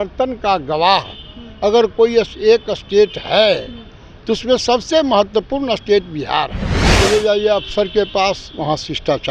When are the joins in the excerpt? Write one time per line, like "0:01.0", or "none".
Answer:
0:06.9

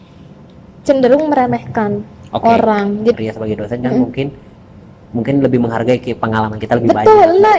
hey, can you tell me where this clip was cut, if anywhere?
0:03.1

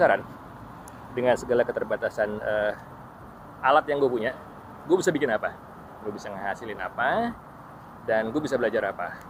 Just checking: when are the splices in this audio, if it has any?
none

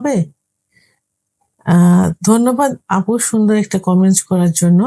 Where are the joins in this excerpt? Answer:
none

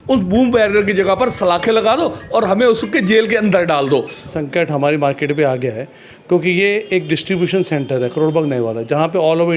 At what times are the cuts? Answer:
0:04.3

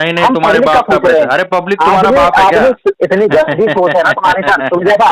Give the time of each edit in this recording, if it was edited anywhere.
0:03.0

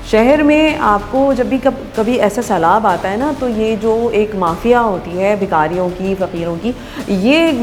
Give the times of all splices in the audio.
none

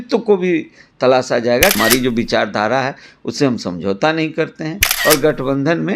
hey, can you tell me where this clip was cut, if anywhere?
0:01.8
0:04.9

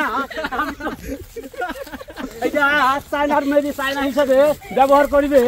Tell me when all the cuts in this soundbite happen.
0:02.2

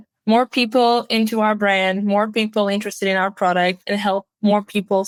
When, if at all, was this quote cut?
none

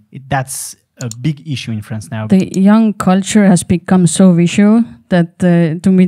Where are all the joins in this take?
0:02.2

